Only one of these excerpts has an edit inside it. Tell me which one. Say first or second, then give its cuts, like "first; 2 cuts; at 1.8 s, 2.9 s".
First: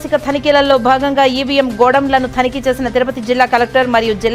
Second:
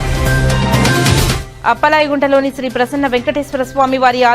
second; 1 cut; at 1.5 s